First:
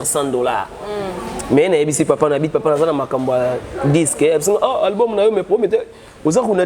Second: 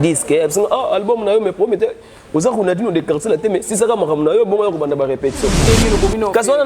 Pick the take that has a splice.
second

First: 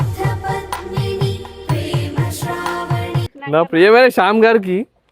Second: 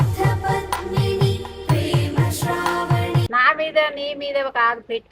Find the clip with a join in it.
first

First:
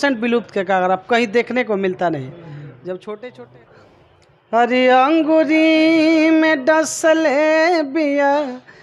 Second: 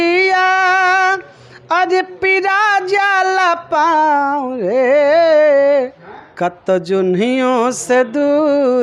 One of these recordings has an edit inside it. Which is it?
first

